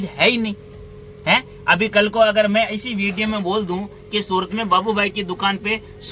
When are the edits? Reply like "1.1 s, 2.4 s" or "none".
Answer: none